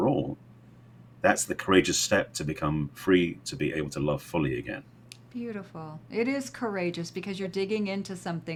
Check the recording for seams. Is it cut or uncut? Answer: uncut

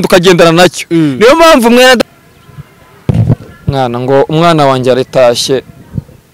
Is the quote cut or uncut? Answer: cut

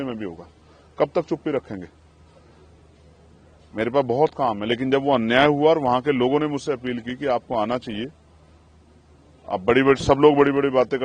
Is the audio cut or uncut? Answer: uncut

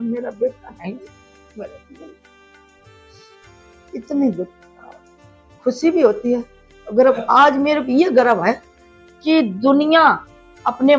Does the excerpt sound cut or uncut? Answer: uncut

